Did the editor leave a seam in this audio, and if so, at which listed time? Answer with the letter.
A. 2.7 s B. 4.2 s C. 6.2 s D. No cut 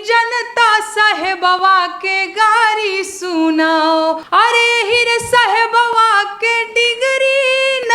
B